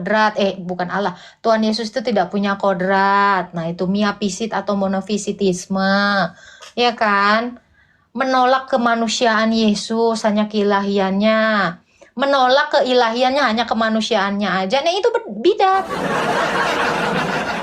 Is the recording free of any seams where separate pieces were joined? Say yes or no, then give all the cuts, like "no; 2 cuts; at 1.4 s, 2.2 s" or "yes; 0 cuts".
yes; 0 cuts